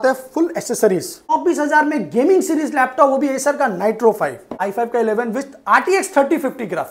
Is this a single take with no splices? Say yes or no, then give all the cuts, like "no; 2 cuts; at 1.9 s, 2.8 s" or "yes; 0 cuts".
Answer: no; 2 cuts; at 1.2 s, 4.6 s